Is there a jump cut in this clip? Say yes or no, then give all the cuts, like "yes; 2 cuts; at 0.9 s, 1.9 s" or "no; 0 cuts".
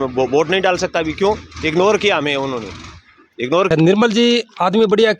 yes; 1 cut; at 3.7 s